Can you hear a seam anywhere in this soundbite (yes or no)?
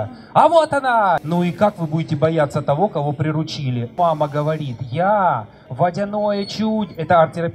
yes